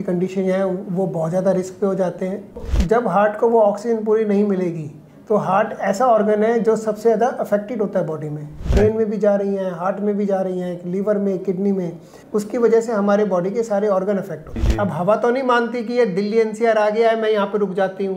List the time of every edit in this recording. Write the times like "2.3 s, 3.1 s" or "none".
2.7 s, 8.6 s, 12.1 s, 14.6 s